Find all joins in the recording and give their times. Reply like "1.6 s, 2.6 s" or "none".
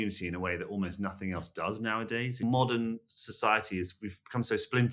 2.4 s